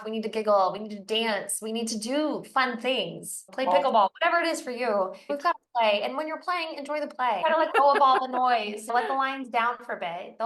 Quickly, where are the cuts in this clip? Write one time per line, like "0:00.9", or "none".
0:03.5
0:05.3
0:07.4
0:08.9